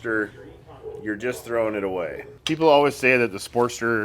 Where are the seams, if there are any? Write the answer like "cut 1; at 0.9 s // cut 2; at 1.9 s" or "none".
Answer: cut 1; at 2.3 s